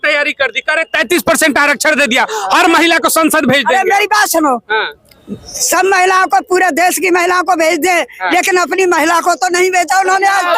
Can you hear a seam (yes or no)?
no